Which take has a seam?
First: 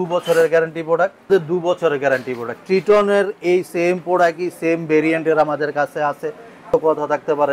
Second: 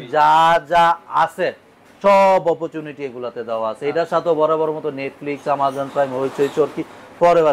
first; 2 cuts; at 1.2 s, 6.6 s

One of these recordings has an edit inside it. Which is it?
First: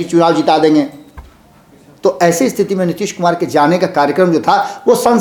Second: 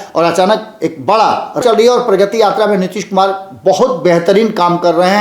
second; 1 cut; at 1.6 s

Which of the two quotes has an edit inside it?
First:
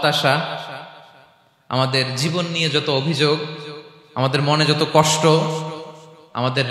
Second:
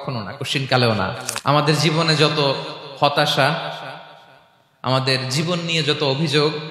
second; 1 cut; at 1.3 s

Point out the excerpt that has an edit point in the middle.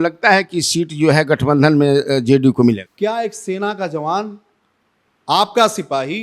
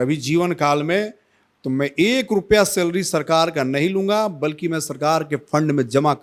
first; 1 cut; at 2.9 s

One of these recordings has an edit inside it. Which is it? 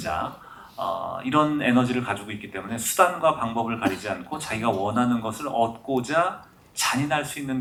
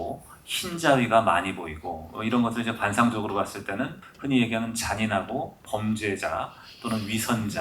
second; 1 cut; at 4.1 s

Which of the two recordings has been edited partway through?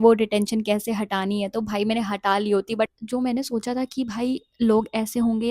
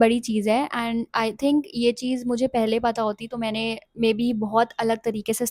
first; 1 cut; at 2.9 s

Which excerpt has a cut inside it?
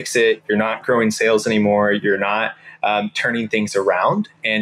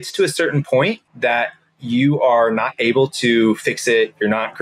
second; 1 cut; at 1.1 s

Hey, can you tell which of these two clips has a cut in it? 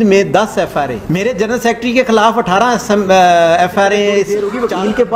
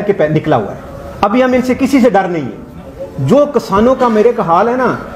first; 2 cuts; at 1.0 s, 4.3 s

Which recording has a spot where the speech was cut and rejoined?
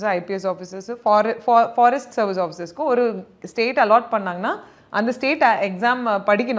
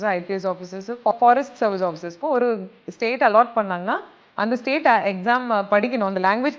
second; 1 cut; at 1.1 s

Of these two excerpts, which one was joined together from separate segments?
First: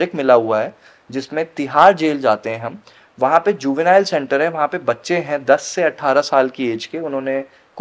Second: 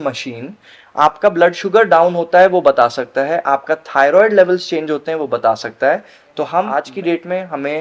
second; 1 cut; at 6.7 s

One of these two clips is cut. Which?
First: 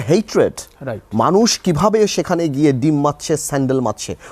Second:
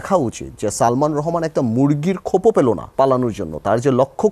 second; 1 cut; at 2.9 s

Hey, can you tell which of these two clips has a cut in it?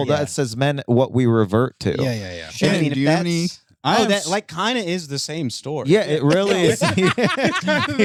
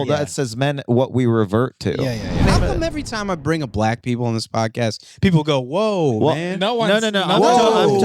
second; 1 cut; at 2.5 s

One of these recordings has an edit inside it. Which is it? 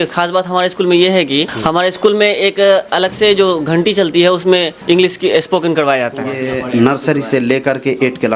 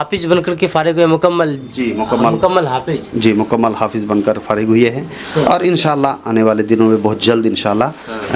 first; 3 cuts; at 1.5 s, 4.7 s, 6.5 s

